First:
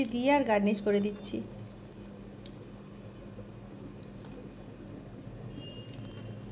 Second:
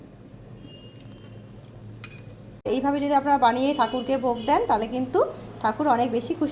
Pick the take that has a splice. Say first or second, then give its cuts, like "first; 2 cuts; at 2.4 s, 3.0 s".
second; 1 cut; at 2.7 s